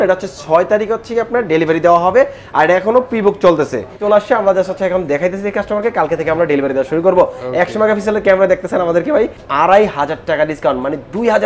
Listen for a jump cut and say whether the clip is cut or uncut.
cut